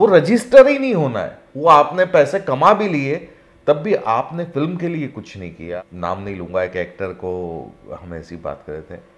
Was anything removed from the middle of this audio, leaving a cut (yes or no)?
yes